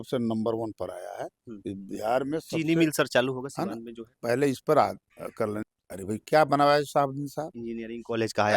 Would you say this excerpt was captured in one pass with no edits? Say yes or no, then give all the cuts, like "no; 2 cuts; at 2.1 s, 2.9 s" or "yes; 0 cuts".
no; 1 cut; at 5.6 s